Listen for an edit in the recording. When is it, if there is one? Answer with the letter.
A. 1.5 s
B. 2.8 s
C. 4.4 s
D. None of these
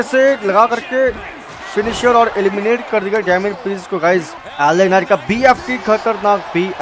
C